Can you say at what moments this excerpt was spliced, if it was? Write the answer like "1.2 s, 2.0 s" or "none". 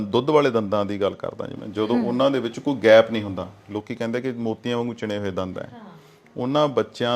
none